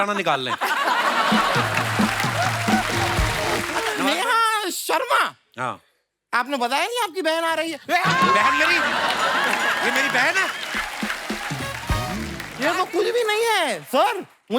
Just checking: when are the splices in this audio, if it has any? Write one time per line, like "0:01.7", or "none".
0:04.0
0:12.4